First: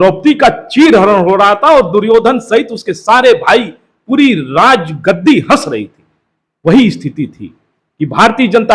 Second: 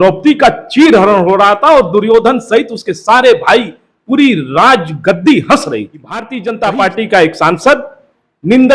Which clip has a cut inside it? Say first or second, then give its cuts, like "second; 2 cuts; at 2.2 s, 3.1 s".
second; 1 cut; at 6.4 s